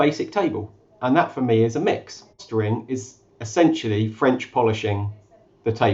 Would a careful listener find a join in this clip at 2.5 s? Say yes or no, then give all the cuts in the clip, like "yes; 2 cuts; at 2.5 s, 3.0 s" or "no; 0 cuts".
yes; 1 cut; at 2.5 s